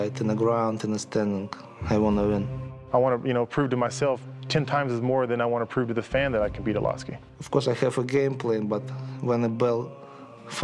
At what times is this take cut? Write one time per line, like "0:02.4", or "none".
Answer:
0:02.6
0:07.4